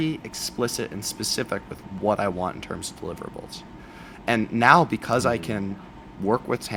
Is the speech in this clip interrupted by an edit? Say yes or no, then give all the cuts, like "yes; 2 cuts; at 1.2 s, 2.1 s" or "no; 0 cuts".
no; 0 cuts